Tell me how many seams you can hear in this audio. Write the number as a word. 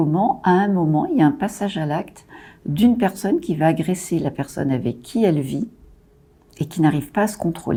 zero